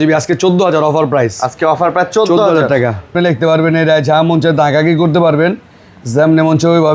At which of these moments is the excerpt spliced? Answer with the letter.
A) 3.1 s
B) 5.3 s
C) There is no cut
A